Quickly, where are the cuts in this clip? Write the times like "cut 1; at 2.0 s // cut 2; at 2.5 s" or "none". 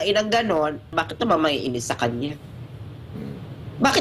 cut 1; at 0.9 s